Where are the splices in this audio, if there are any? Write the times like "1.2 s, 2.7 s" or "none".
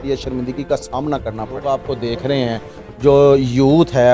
1.6 s